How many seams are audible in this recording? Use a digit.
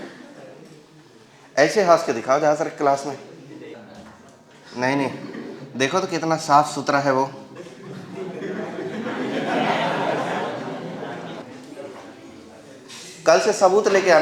1